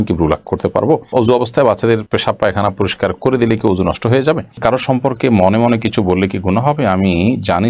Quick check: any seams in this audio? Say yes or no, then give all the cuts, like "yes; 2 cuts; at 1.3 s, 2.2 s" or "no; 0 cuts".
yes; 2 cuts; at 1.1 s, 4.6 s